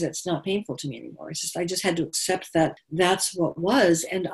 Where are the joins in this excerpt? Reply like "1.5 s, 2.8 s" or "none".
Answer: 2.8 s